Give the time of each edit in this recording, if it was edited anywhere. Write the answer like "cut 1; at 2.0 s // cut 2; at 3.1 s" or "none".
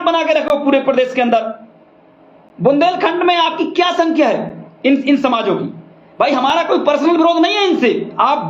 none